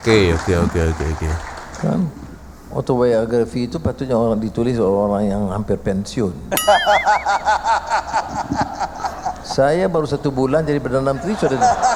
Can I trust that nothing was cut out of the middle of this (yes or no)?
yes